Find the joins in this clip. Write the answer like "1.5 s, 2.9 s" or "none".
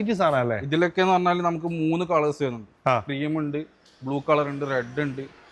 none